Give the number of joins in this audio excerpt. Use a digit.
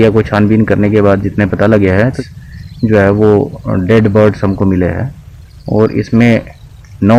0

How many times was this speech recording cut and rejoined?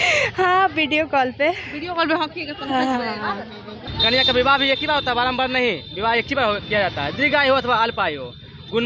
1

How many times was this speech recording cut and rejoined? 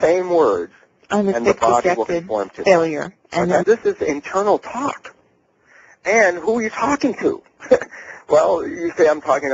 0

